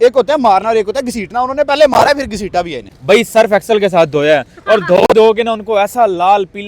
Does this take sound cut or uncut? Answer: cut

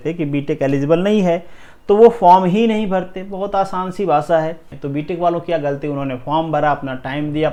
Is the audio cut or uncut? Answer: uncut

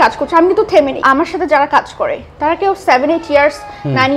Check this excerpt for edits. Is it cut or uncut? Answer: cut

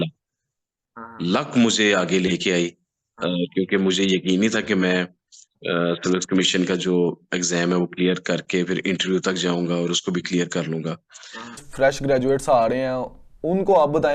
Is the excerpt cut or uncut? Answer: cut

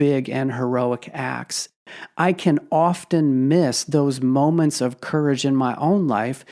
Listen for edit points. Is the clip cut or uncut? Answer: cut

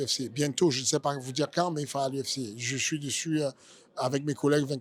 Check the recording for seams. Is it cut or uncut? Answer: uncut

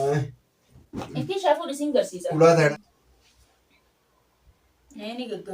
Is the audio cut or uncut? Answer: cut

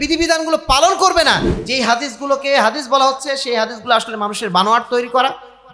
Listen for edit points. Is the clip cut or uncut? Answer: cut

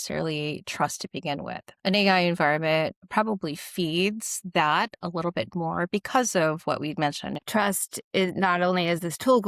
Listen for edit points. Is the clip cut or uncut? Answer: cut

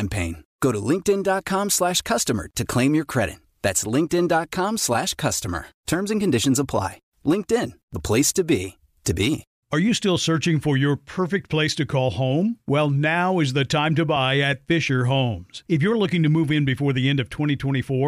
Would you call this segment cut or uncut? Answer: cut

